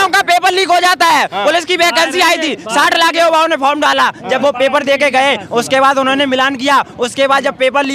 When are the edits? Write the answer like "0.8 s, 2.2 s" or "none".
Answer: none